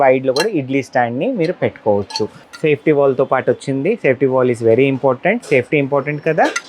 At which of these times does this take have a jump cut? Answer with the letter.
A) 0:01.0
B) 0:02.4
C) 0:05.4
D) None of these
B